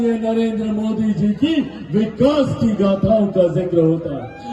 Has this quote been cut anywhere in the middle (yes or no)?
no